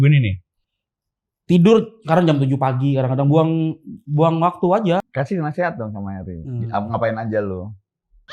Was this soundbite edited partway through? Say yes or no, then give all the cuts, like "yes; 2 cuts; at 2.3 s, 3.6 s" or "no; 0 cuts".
yes; 1 cut; at 5.0 s